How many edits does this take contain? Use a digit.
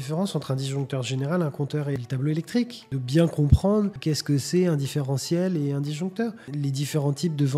4